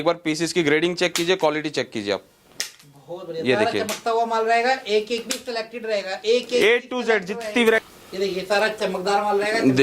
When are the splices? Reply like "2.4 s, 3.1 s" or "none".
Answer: 7.8 s